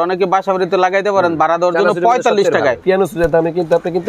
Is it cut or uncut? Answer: cut